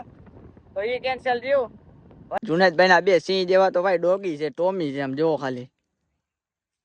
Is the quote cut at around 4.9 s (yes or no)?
no